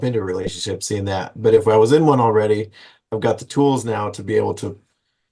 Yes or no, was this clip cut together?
no